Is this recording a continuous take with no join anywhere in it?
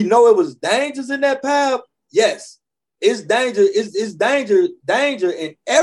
yes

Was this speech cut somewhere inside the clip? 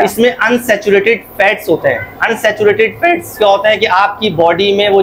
no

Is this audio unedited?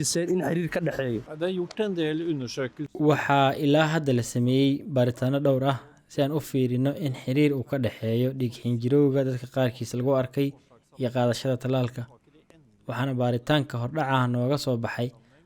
no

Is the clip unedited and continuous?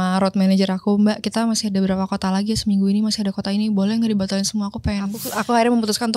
no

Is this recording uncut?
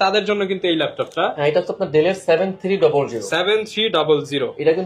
yes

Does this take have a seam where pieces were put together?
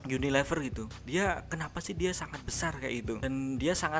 no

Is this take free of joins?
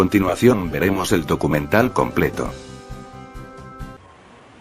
yes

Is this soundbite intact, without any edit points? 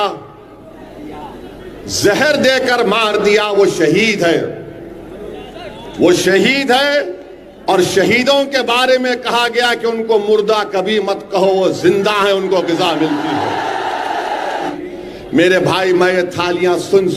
no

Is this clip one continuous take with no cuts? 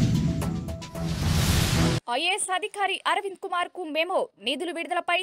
no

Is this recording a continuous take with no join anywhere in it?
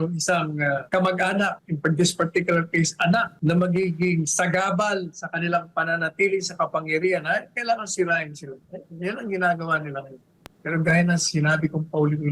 no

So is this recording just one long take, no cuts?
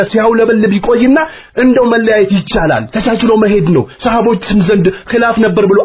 yes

